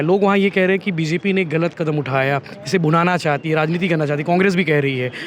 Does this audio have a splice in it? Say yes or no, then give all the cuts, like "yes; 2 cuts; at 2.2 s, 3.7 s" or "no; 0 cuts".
no; 0 cuts